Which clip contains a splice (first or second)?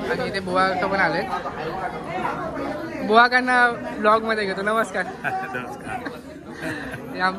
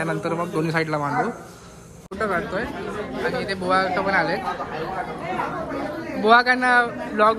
second